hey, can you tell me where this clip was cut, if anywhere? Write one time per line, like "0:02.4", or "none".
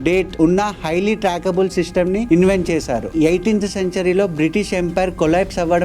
0:03.1